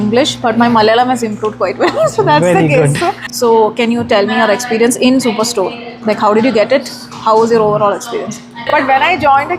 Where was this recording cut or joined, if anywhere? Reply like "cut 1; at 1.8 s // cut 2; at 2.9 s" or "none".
cut 1; at 3.2 s // cut 2; at 8.5 s